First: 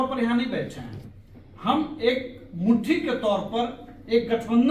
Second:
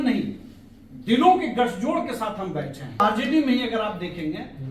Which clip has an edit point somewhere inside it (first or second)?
second